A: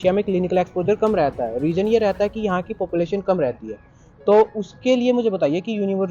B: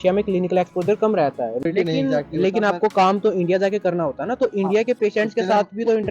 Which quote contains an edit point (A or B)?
B